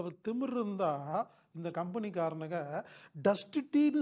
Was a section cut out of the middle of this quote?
no; 0 cuts

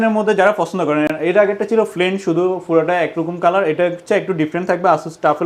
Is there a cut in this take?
no; 0 cuts

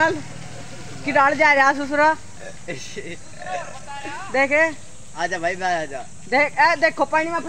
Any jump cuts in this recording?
no; 0 cuts

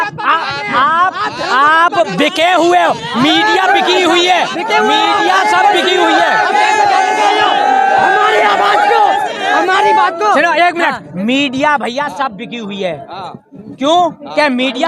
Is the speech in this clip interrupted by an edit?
no; 0 cuts

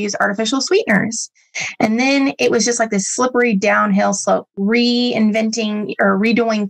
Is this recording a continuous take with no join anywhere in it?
yes; 0 cuts

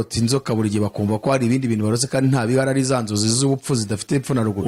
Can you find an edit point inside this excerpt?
no; 0 cuts

